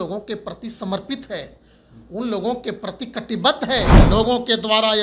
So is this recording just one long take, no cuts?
no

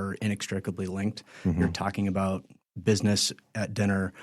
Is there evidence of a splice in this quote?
no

